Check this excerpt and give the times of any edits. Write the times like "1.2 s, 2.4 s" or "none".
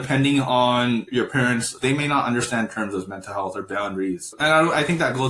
1.7 s, 4.3 s